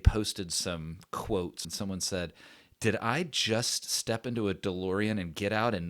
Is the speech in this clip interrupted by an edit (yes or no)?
yes